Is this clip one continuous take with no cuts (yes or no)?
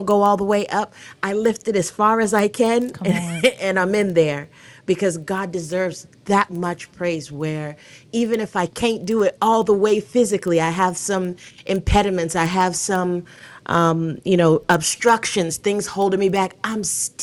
yes